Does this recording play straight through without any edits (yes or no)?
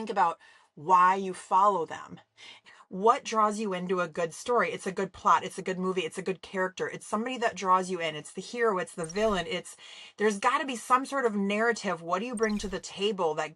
no